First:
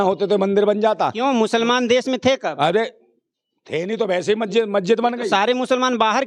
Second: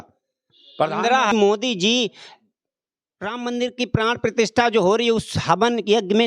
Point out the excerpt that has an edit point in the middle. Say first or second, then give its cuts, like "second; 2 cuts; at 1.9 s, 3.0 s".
second; 1 cut; at 1.3 s